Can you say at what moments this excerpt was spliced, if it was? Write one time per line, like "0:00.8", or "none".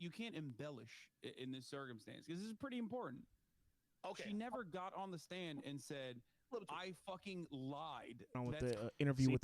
0:08.4